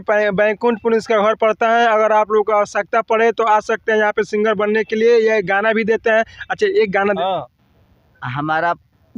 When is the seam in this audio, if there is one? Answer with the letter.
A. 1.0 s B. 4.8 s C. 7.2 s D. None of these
C